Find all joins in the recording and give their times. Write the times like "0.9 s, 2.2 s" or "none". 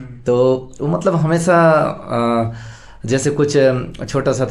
none